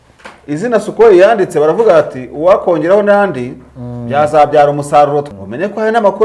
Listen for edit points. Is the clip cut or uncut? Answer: cut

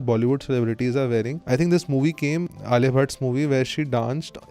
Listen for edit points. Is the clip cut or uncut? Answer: cut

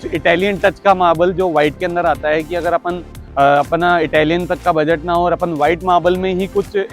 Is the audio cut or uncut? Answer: uncut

